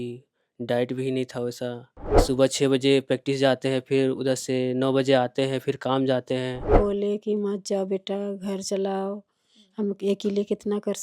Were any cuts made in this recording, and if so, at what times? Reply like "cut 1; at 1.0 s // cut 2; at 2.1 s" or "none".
cut 1; at 2.1 s // cut 2; at 6.7 s